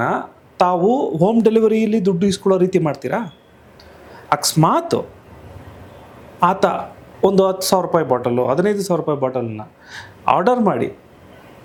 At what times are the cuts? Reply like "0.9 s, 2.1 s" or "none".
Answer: none